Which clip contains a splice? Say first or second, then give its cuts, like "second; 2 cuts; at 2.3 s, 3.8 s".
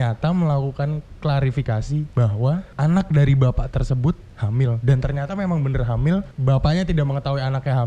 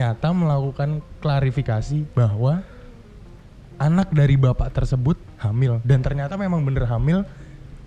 first; 2 cuts; at 2.7 s, 6.3 s